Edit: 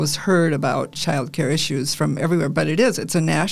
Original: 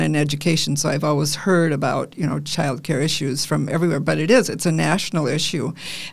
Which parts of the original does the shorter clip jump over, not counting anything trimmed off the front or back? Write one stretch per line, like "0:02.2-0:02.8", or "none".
0:02.1-0:02.4

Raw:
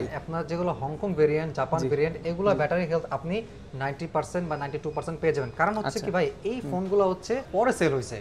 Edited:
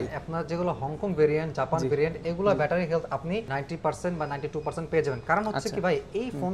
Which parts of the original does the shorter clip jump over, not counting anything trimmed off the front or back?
0:03.5-0:03.8

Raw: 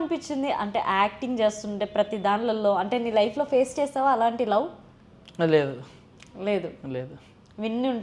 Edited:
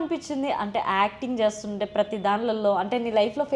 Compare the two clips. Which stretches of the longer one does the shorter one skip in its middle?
none

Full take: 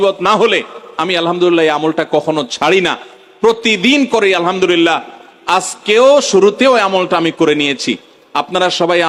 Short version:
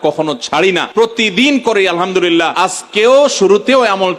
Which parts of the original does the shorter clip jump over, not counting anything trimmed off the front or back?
0:03.0-0:03.3
0:05.0-0:05.4

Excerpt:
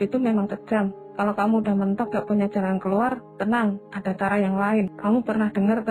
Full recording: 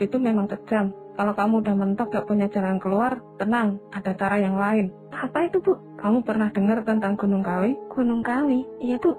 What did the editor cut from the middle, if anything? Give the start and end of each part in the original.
0:04.9-0:05.9

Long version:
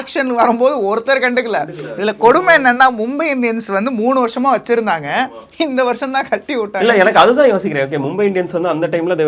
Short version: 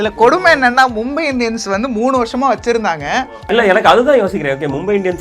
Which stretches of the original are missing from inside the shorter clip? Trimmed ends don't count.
0:05.4-0:06.7

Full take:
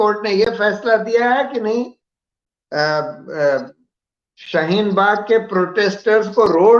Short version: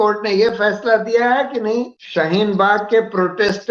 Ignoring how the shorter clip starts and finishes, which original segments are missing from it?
0:02.0-0:04.4

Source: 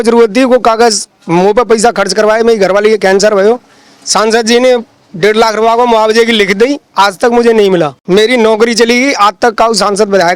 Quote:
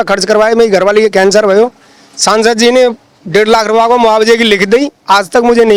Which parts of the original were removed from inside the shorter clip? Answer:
none

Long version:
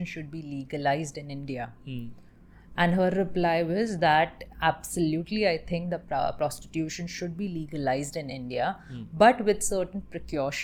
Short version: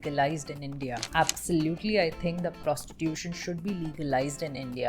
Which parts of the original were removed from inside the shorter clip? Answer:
0:01.7-0:04.5
0:06.1-0:06.3

